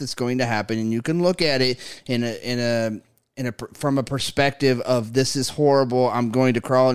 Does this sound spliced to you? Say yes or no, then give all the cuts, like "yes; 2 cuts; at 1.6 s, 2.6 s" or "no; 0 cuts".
no; 0 cuts